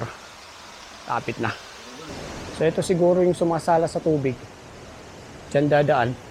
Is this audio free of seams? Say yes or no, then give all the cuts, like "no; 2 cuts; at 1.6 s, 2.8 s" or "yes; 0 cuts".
no; 1 cut; at 2.1 s